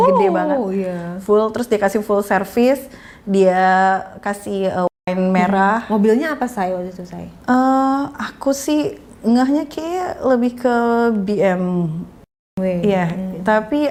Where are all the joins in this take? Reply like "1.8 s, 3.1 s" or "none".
none